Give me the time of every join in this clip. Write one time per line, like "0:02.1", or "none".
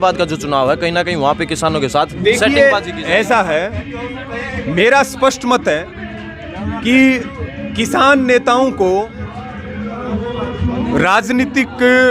none